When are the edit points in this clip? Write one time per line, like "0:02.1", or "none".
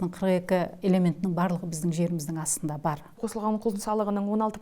0:03.2